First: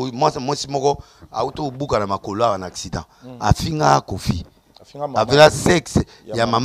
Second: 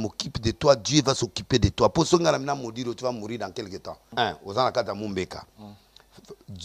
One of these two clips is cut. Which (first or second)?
second